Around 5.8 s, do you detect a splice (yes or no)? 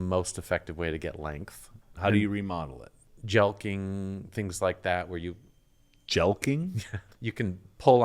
no